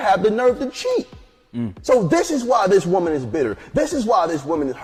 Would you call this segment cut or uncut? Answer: uncut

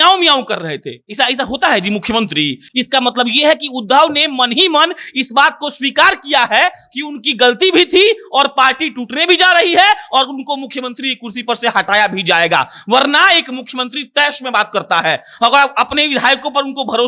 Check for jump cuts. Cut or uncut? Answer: uncut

